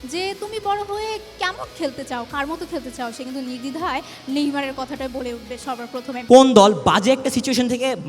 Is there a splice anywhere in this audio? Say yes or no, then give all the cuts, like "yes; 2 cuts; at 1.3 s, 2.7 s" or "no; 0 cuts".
yes; 1 cut; at 6.1 s